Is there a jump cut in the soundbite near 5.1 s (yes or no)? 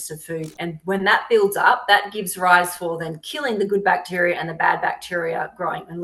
no